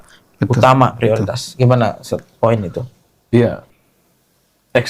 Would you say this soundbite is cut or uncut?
cut